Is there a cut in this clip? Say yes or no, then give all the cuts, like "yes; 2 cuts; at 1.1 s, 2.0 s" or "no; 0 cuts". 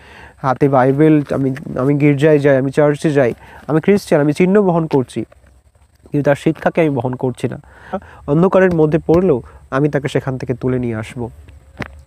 yes; 1 cut; at 8.1 s